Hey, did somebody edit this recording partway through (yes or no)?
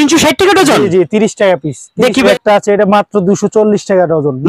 yes